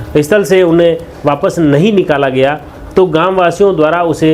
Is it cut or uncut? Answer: uncut